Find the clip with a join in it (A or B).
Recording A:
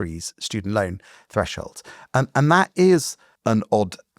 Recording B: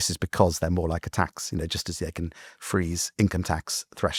A